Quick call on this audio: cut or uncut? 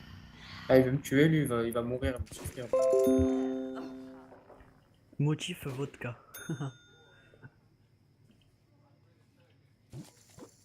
cut